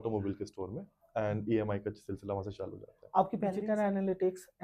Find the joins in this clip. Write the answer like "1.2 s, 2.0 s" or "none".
3.6 s